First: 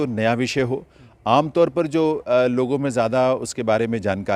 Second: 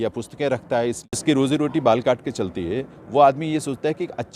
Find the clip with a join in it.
second; 1 cut; at 1.0 s

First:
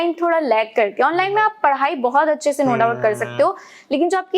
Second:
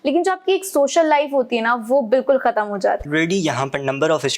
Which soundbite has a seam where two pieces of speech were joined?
second; 1 cut; at 3.1 s

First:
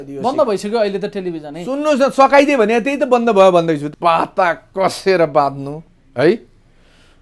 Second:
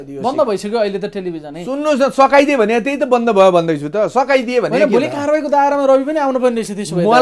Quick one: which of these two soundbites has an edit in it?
first; 1 cut; at 3.9 s

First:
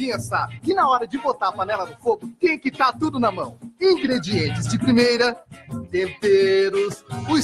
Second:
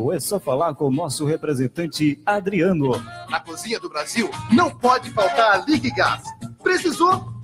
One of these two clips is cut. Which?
second; 1 cut; at 4.7 s

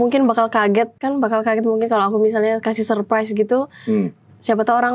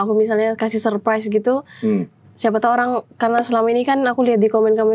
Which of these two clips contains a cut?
first; 1 cut; at 1.0 s

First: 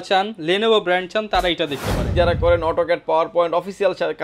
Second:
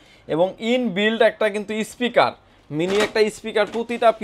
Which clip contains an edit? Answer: first; 1 cut; at 2.0 s

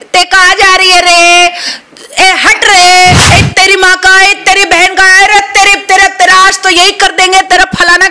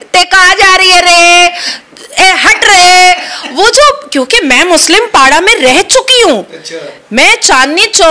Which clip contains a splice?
first; 1 cut; at 3.2 s

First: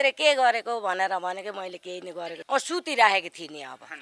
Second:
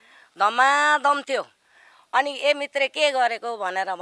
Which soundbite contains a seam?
first; 1 cut; at 2.4 s

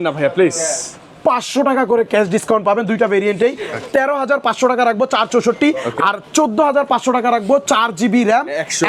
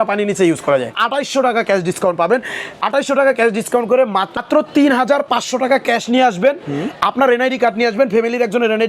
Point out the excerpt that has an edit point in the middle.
second; 2 cuts; at 1.0 s, 4.4 s

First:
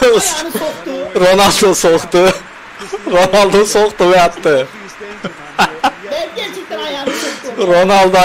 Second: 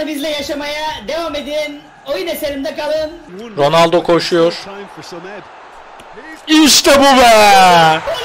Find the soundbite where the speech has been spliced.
second; 1 cut; at 3.2 s

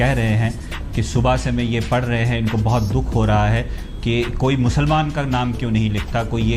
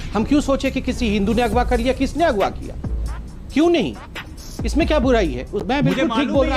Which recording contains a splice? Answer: second; 1 cut; at 5.5 s

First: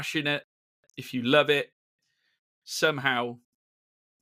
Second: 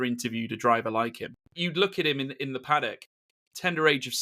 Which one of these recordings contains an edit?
second; 1 cut; at 1.6 s

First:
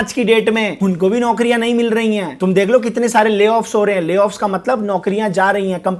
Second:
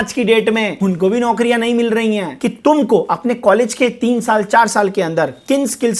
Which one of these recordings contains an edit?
second; 1 cut; at 2.3 s

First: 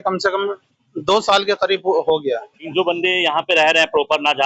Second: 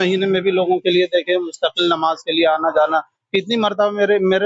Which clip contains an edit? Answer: first; 1 cut; at 2.6 s

